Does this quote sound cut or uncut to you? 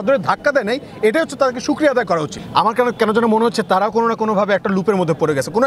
cut